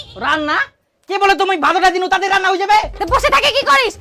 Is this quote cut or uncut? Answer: cut